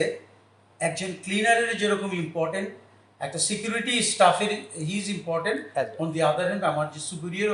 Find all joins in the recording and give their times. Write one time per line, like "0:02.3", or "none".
none